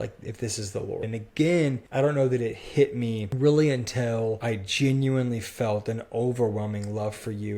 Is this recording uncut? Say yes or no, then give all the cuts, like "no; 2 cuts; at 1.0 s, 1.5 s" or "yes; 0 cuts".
no; 4 cuts; at 1.1 s, 1.8 s, 3.3 s, 4.4 s